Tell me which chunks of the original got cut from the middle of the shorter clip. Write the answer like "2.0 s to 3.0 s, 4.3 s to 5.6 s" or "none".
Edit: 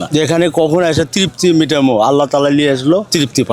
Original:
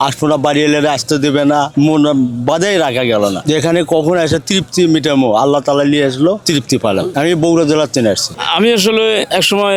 none